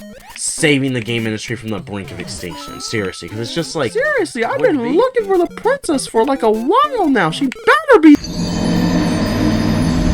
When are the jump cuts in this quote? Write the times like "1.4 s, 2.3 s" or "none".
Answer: 3.9 s